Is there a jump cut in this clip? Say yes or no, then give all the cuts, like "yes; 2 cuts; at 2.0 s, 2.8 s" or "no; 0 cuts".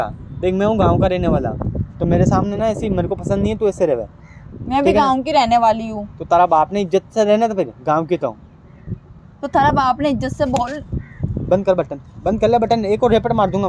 no; 0 cuts